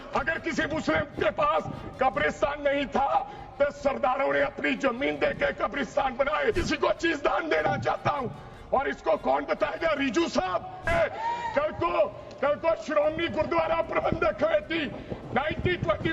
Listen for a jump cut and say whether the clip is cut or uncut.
cut